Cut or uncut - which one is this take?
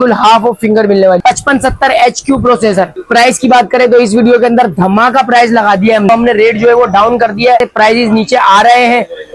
cut